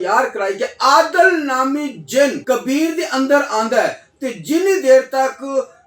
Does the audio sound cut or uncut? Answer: cut